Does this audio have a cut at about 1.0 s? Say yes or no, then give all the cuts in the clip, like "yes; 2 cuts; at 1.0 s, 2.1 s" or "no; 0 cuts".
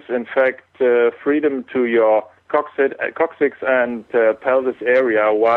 no; 1 cut; at 2.4 s